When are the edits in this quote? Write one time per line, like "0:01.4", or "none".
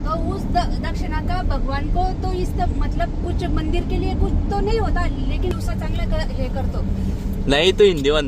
0:05.5